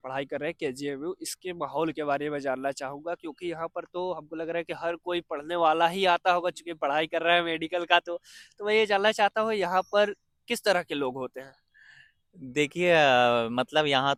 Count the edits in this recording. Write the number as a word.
zero